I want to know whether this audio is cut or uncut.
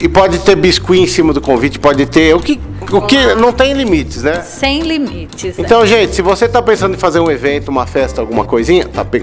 uncut